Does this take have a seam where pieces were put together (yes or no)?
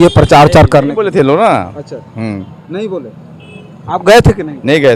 no